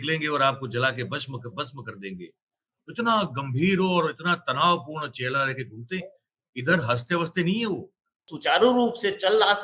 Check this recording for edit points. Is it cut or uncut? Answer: cut